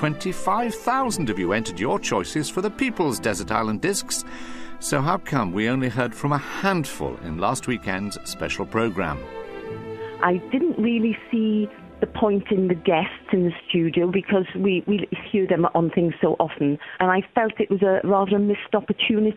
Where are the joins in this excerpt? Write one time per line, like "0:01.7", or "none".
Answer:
none

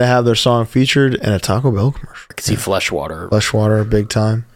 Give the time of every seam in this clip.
0:02.4

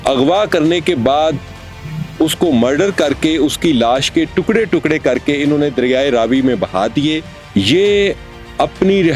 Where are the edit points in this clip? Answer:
0:07.3

